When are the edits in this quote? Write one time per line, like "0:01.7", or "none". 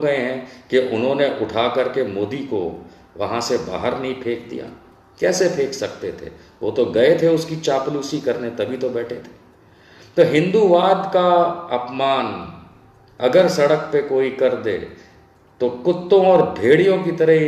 none